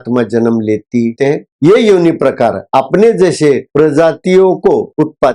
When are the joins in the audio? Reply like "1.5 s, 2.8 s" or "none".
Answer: 1.3 s